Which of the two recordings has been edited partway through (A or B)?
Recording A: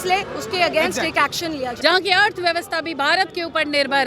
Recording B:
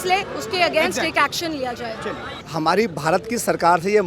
A